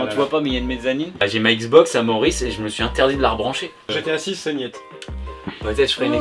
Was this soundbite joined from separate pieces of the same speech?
yes; 2 cuts; at 1.3 s, 3.9 s

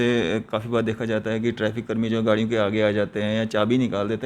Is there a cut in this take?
no; 0 cuts

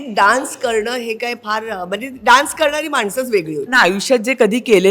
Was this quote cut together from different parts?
yes; 1 cut; at 3.7 s

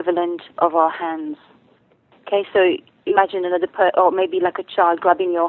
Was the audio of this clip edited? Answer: no; 0 cuts

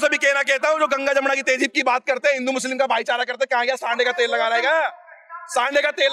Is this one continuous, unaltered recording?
yes; 0 cuts

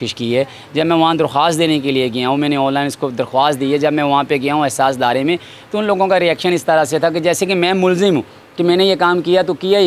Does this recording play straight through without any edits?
yes; 0 cuts

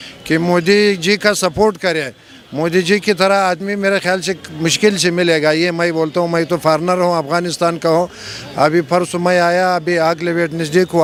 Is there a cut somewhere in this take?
no; 0 cuts

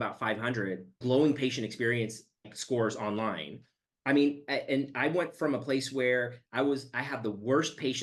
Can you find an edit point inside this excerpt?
yes; 2 cuts; at 1.0 s, 2.5 s

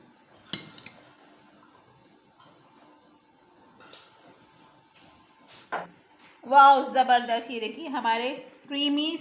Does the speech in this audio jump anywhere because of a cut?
yes; 1 cut; at 6.0 s

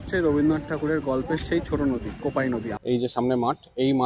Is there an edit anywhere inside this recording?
yes; 1 cut; at 2.7 s

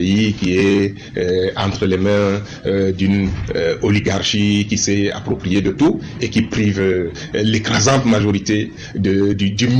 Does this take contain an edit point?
no; 0 cuts

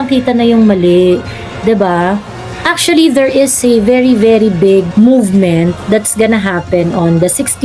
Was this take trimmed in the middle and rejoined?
no; 0 cuts

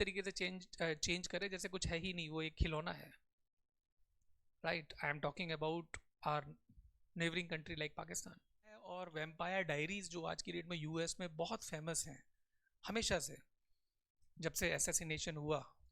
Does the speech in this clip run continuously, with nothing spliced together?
no; 1 cut; at 9.1 s

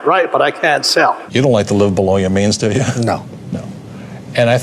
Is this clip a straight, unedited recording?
no; 1 cut; at 1.2 s

